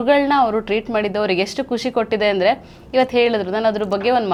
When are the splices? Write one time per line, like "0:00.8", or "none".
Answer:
none